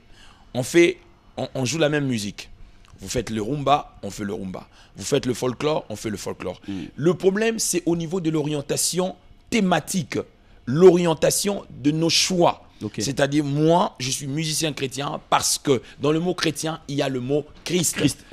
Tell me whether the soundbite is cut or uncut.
uncut